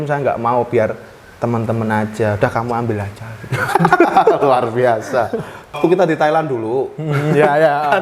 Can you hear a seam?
yes; 1 cut; at 5.8 s

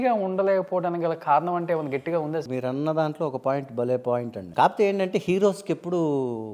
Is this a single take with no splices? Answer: no; 2 cuts; at 2.5 s, 4.4 s

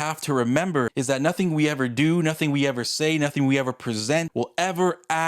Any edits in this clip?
yes; 2 cuts; at 0.9 s, 4.3 s

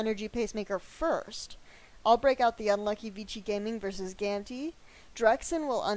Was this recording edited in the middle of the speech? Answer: yes; 1 cut; at 5.1 s

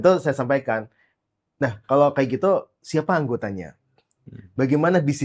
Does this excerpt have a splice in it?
no; 0 cuts

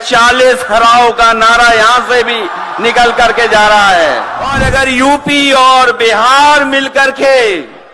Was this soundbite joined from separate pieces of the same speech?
yes; 1 cut; at 4.6 s

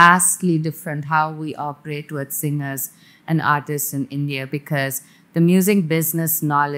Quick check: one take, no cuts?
yes; 0 cuts

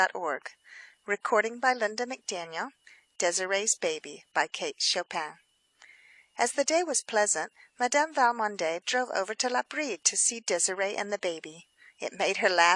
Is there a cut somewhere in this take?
yes; 1 cut; at 7.7 s

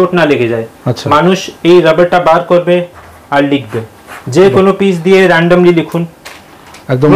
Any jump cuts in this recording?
no; 0 cuts

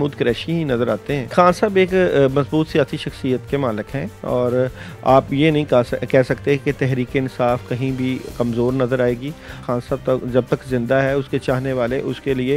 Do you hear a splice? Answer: yes; 2 cuts; at 1.3 s, 9.6 s

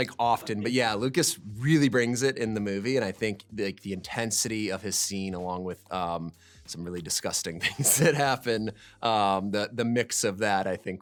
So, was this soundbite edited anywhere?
no; 0 cuts

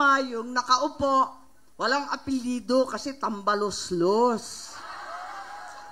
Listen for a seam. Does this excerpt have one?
no; 0 cuts

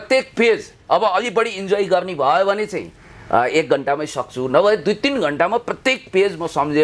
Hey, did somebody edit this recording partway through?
no; 0 cuts

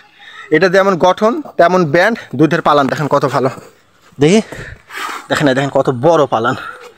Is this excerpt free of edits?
yes; 0 cuts

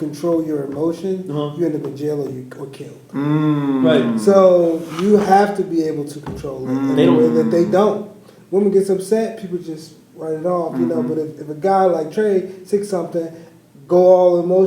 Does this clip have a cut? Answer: no; 0 cuts

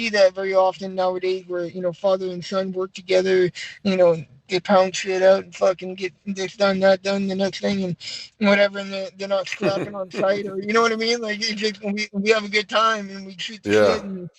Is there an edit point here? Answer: no; 0 cuts

